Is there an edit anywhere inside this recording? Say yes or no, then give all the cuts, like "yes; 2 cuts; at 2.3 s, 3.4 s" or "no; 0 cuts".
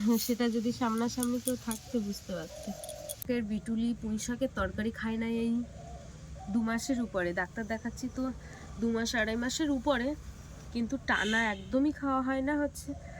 yes; 1 cut; at 3.2 s